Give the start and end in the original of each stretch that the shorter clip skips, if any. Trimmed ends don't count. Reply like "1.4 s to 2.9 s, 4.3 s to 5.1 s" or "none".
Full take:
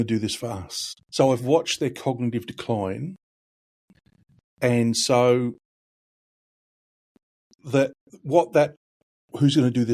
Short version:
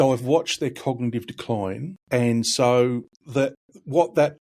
3.1 s to 4.4 s, 5.7 s to 7.5 s